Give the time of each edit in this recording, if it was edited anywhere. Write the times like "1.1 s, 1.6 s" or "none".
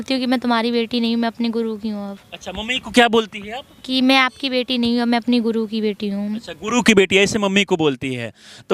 none